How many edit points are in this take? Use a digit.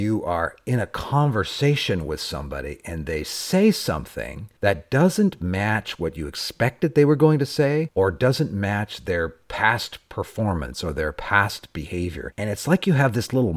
0